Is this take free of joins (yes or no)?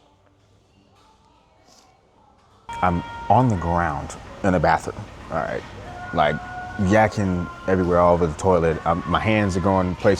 no